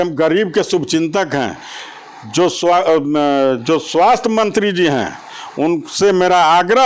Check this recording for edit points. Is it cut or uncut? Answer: uncut